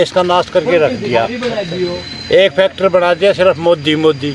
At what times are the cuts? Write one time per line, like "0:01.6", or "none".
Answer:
none